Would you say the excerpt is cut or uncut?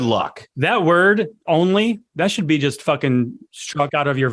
cut